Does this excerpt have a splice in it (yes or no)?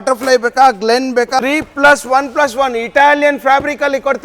yes